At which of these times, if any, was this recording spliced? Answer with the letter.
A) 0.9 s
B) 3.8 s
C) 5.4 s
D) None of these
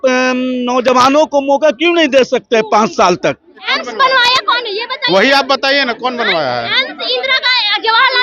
B